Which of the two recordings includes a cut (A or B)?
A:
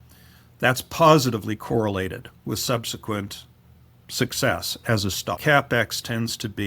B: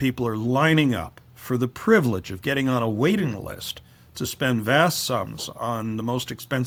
A